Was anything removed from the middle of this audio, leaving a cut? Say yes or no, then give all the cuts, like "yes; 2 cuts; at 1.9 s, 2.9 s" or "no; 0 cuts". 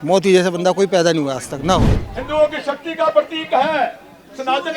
yes; 1 cut; at 1.9 s